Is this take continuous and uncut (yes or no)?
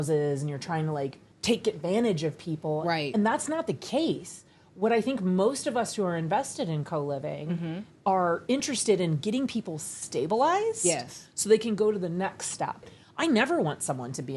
no